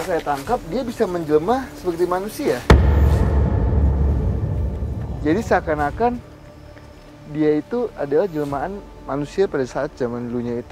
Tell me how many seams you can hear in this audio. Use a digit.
0